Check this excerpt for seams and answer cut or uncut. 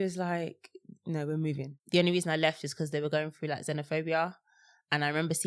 cut